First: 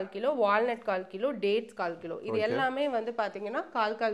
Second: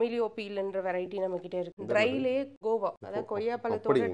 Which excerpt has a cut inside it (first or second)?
second